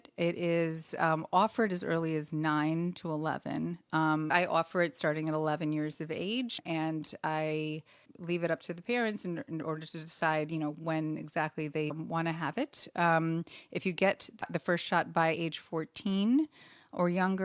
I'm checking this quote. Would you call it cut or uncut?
cut